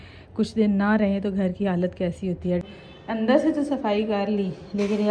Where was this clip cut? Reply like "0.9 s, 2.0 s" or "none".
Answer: 2.6 s